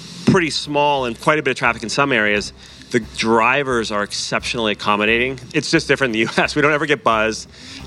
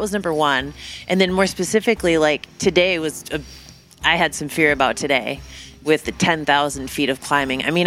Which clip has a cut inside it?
first; 2 cuts; at 1.2 s, 5.4 s

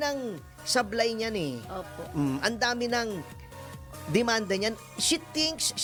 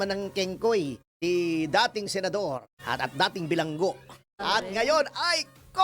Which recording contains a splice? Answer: second; 3 cuts; at 1.0 s, 2.7 s, 4.2 s

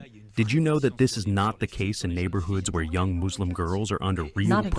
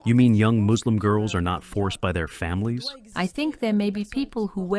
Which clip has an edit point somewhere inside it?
second; 1 cut; at 2.9 s

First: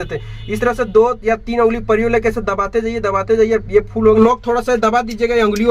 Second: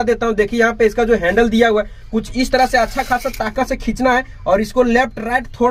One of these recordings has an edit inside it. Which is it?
first; 1 cut; at 4.2 s

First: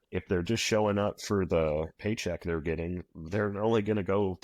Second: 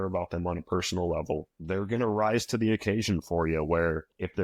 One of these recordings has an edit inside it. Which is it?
first; 2 cuts; at 1.9 s, 3.1 s

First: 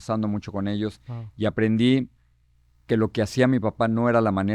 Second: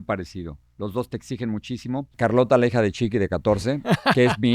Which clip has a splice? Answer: second; 1 cut; at 2.1 s

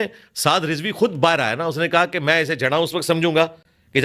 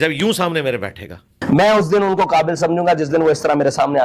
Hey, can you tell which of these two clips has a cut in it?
second; 1 cut; at 1.4 s

